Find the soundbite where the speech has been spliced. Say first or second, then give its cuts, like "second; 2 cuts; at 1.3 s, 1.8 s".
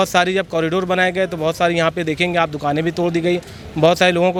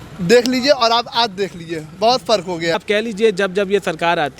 second; 1 cut; at 2.7 s